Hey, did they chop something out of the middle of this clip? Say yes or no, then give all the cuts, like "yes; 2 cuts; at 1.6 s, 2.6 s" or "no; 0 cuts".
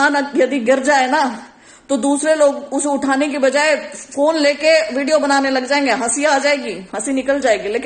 no; 0 cuts